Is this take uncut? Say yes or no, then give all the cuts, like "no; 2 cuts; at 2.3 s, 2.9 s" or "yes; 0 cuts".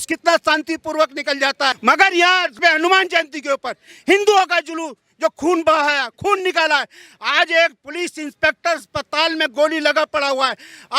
no; 1 cut; at 2.5 s